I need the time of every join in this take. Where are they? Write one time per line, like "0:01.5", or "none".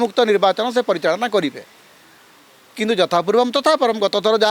none